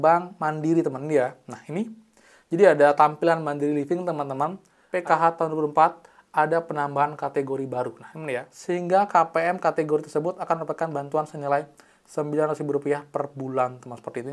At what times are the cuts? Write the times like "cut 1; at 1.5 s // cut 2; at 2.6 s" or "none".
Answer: cut 1; at 4.8 s // cut 2; at 8.5 s